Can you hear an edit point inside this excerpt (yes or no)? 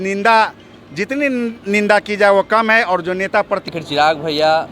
yes